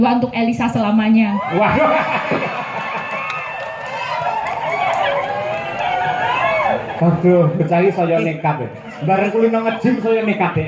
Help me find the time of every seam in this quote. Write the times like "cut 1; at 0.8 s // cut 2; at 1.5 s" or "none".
none